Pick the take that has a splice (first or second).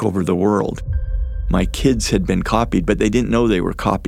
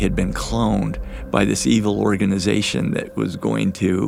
first